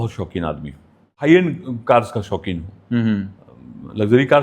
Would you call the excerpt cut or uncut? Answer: cut